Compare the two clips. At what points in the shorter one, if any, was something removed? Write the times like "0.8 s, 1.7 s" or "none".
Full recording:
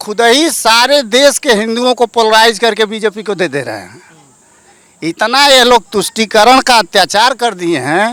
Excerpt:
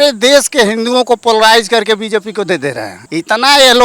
2.9 s